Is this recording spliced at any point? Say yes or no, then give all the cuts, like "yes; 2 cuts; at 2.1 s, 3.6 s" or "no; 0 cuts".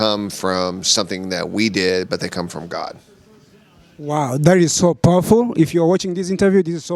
no; 0 cuts